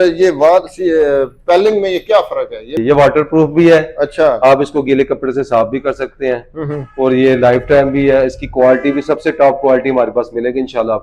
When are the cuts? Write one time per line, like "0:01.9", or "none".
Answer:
0:02.8

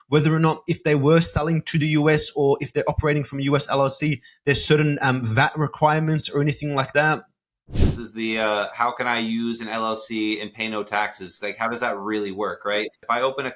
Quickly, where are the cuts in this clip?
0:07.6
0:12.8

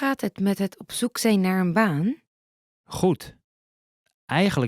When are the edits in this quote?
none

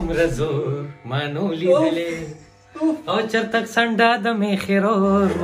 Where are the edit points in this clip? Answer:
none

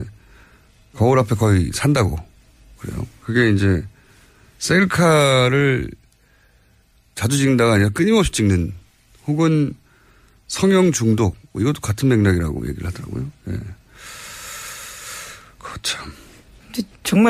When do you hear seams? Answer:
0:05.1

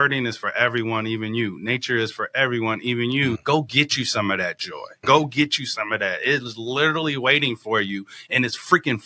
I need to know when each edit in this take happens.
0:03.4
0:05.0

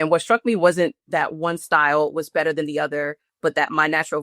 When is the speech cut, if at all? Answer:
0:00.9

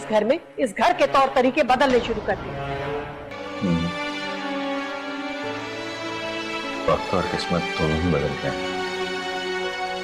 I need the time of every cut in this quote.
0:03.4

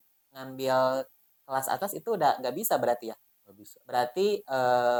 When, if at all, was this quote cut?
none

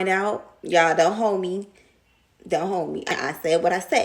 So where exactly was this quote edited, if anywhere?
0:03.1

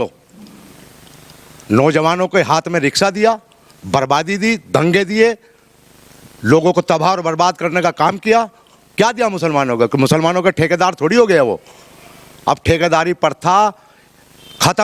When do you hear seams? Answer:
none

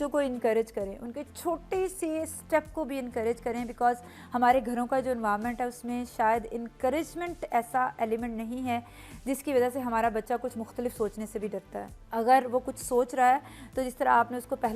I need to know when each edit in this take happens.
none

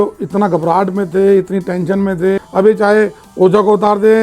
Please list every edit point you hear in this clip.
0:02.4

